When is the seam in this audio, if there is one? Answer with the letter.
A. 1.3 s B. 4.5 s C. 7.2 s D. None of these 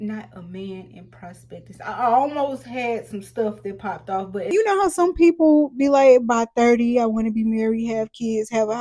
B